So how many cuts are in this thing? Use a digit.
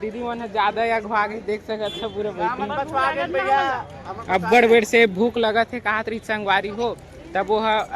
0